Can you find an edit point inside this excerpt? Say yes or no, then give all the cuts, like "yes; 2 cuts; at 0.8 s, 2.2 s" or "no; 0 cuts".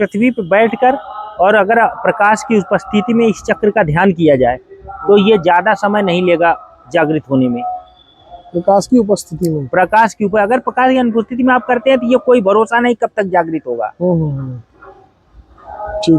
no; 0 cuts